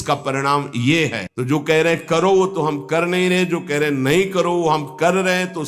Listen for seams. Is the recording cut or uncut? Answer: cut